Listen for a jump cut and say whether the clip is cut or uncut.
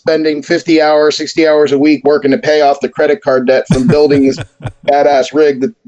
uncut